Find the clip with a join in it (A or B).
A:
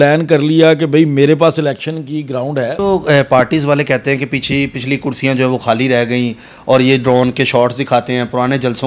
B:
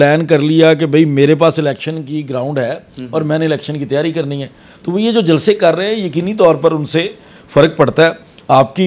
A